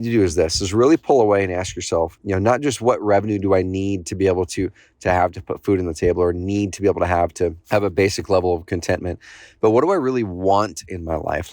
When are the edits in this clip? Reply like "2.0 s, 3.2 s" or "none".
2.1 s, 7.6 s

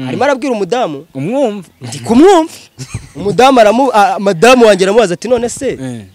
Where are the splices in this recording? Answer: none

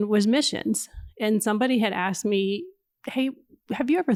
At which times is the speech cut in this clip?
none

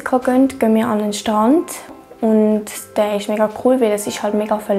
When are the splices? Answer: 1.9 s

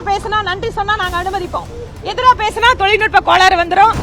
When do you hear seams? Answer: none

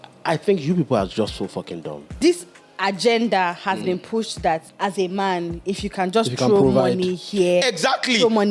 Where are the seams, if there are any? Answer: 2.1 s, 4.7 s

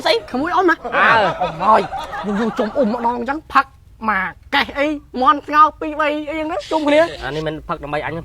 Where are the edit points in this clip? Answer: 1.5 s, 7.2 s

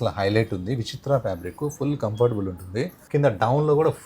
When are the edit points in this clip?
3.0 s

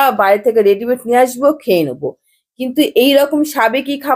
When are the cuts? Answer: none

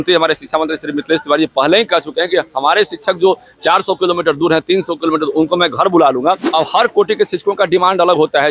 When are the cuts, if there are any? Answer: 6.4 s

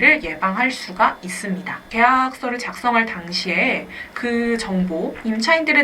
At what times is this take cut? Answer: 1.8 s

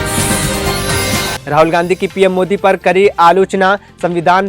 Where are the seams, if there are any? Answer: 1.4 s

